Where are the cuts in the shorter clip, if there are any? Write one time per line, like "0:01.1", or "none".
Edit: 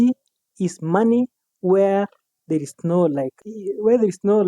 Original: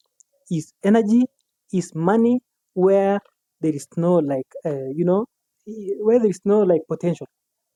0:03.4